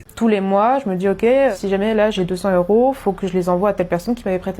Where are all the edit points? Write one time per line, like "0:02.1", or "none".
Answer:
0:01.5